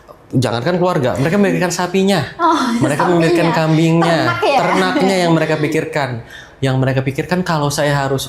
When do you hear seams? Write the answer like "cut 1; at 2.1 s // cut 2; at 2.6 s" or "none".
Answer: none